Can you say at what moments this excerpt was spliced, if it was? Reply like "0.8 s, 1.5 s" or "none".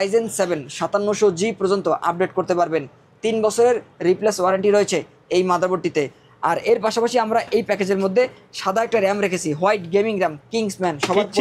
none